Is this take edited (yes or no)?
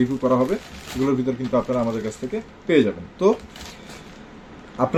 no